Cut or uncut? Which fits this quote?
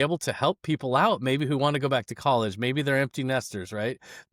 uncut